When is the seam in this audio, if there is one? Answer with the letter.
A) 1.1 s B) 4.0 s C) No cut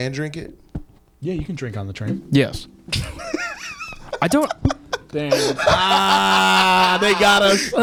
C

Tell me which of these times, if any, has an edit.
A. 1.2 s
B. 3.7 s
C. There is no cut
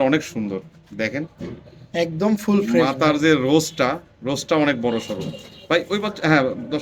C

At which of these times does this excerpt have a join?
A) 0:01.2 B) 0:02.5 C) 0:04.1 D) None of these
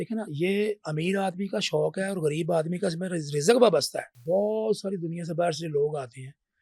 C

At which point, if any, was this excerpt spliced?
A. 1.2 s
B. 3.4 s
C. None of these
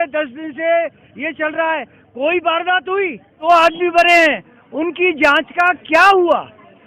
B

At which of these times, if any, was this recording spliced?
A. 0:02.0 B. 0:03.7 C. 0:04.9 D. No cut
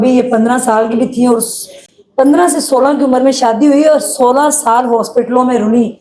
D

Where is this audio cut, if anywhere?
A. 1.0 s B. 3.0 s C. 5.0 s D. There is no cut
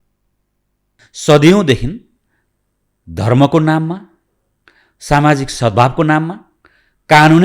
A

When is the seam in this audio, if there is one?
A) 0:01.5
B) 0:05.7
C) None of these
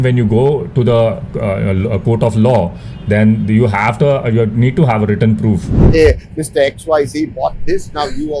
B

